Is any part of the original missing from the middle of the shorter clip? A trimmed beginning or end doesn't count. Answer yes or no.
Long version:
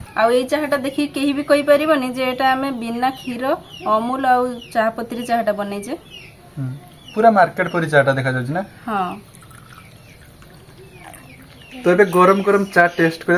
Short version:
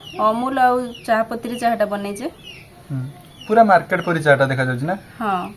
no